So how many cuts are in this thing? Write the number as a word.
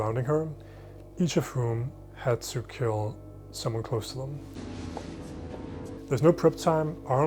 zero